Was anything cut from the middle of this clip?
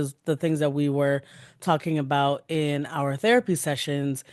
no; 0 cuts

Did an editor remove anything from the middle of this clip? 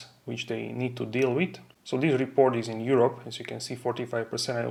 no; 0 cuts

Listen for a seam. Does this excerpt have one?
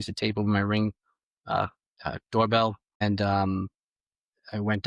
yes; 1 cut; at 3.0 s

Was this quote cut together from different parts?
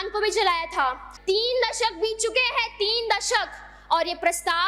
yes; 1 cut; at 1.1 s

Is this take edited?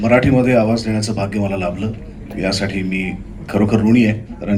no; 0 cuts

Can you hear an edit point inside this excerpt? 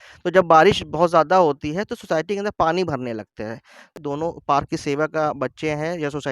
yes; 1 cut; at 3.9 s

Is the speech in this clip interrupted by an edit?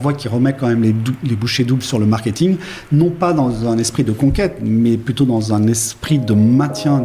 no; 0 cuts

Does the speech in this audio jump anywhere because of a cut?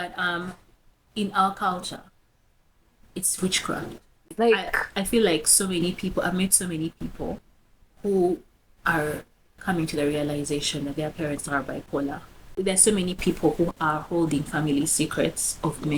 yes; 2 cuts; at 4.2 s, 12.6 s

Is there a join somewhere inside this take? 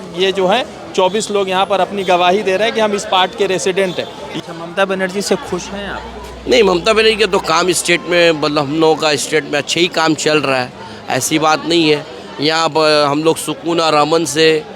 yes; 1 cut; at 4.3 s

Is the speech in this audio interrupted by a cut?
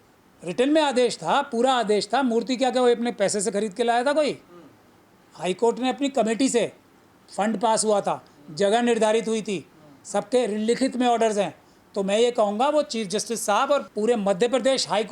yes; 1 cut; at 13.9 s

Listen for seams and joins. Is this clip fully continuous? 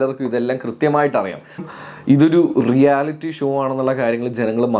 no; 1 cut; at 1.6 s

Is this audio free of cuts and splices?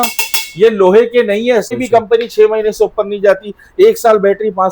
no; 1 cut; at 1.7 s

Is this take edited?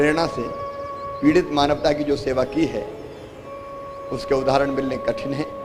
no; 0 cuts

